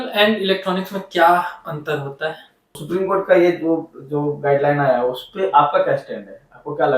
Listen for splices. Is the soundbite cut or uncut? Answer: cut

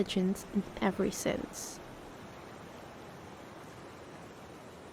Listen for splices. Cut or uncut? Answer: uncut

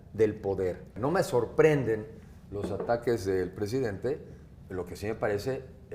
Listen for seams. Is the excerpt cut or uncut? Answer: cut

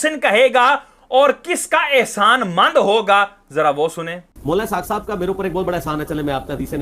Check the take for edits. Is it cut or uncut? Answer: cut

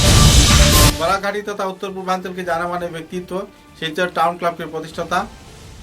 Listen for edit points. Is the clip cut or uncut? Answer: uncut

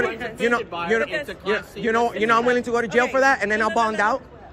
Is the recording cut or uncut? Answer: uncut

